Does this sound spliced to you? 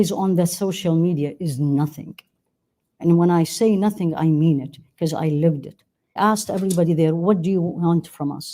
yes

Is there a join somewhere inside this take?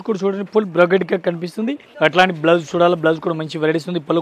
yes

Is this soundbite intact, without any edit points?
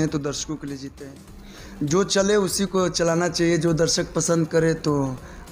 no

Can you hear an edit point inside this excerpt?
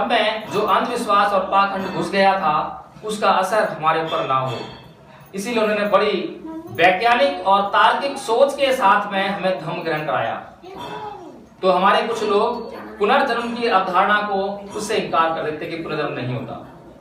no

